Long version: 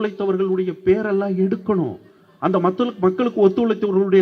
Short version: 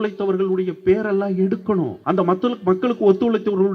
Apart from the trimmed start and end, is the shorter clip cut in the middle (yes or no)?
yes